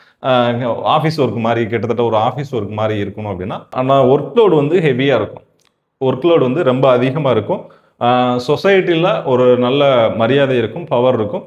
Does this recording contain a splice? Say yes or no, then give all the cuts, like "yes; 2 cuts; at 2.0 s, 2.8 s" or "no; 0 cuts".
yes; 1 cut; at 3.7 s